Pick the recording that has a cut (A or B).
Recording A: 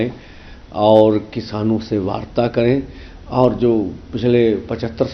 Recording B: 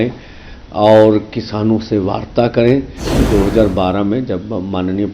B